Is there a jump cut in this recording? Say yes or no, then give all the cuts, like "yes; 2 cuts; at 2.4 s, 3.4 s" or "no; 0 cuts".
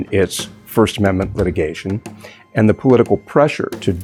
no; 0 cuts